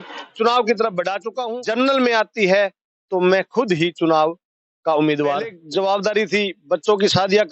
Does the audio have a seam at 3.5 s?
no; 2 cuts; at 1.3 s, 5.6 s

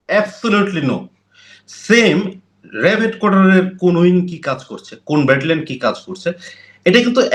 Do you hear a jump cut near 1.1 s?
no; 0 cuts

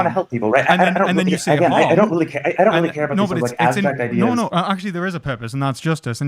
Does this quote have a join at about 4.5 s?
yes; 1 cut; at 4.5 s

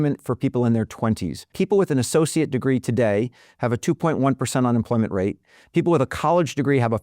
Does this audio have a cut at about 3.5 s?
no; 1 cut; at 1.5 s

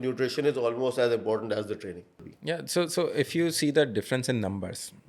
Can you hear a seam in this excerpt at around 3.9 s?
no; 1 cut; at 2.3 s

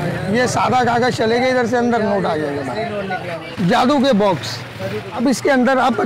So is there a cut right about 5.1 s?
yes; 2 cuts; at 3.4 s, 5.1 s

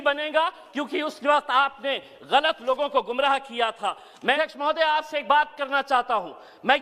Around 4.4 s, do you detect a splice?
yes; 1 cut; at 4.4 s

